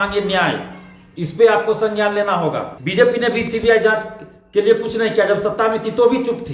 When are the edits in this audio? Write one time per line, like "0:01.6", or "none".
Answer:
0:02.7